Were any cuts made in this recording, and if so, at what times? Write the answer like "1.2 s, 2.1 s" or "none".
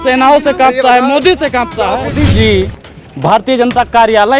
2.1 s